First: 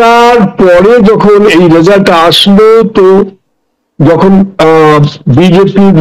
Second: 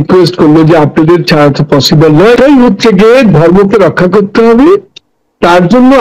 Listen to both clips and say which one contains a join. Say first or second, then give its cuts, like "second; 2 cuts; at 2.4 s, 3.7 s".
second; 1 cut; at 2.4 s